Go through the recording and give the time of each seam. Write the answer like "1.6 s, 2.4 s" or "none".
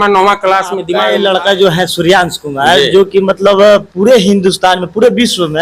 0.9 s